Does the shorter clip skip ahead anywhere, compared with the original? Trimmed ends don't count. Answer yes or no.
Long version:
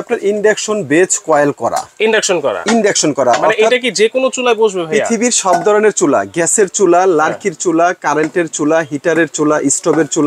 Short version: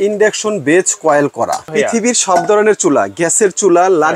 yes